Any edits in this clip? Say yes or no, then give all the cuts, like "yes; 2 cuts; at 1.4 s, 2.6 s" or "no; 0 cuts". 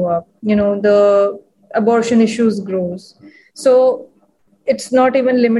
no; 0 cuts